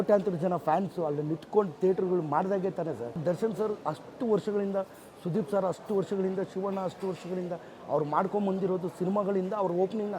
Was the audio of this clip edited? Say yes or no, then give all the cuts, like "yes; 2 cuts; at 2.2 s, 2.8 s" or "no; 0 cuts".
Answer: yes; 1 cut; at 3.2 s